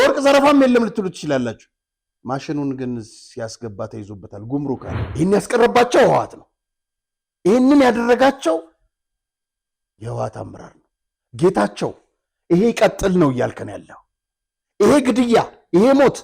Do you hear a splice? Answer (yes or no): yes